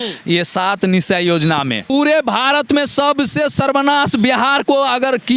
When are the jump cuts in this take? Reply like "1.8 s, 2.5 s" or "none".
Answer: 1.9 s